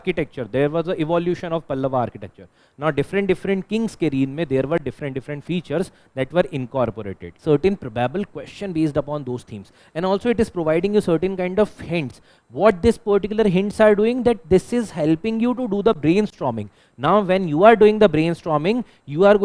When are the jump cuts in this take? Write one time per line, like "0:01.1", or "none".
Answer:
0:07.3